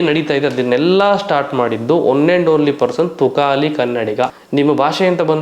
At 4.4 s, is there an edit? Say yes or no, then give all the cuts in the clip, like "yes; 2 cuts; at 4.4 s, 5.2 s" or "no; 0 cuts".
yes; 1 cut; at 4.4 s